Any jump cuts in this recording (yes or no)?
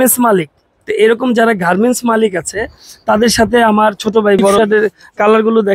yes